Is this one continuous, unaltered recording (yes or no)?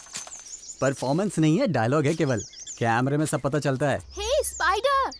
yes